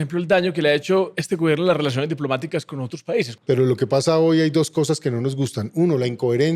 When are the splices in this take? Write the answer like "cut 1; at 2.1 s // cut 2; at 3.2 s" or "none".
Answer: cut 1; at 3.4 s